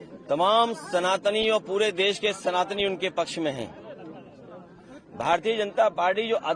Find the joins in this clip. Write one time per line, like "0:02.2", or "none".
none